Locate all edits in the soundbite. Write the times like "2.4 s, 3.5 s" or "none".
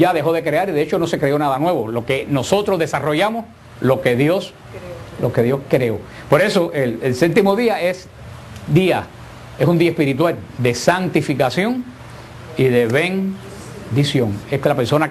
none